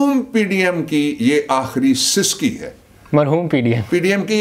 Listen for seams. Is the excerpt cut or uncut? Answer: uncut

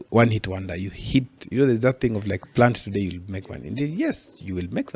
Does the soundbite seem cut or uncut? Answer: uncut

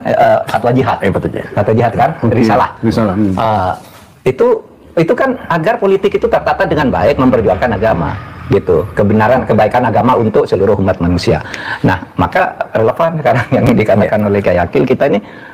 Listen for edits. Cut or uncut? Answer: uncut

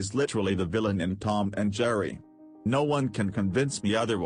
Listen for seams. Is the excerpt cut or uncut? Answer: uncut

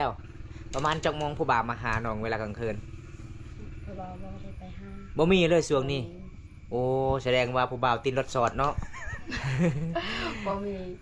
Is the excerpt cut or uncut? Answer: uncut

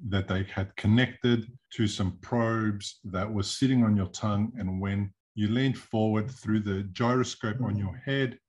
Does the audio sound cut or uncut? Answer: cut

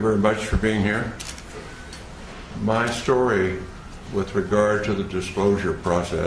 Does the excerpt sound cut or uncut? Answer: uncut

